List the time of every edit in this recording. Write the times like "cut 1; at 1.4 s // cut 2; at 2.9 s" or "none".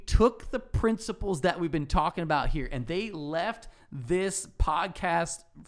none